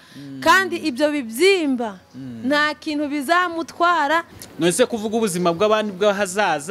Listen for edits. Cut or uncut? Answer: cut